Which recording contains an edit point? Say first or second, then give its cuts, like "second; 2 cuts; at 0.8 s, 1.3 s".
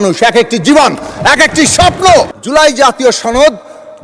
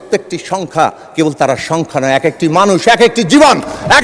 first; 1 cut; at 2.4 s